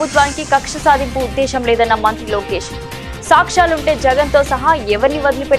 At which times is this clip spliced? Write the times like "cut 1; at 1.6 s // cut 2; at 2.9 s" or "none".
none